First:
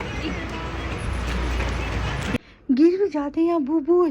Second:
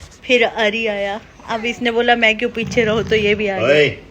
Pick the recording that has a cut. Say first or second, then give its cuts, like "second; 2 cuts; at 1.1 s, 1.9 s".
first; 1 cut; at 2.4 s